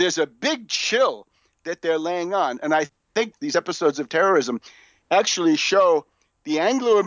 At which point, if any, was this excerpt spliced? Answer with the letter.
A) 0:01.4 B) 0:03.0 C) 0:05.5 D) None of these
B